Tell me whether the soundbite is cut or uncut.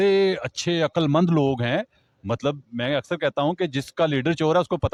uncut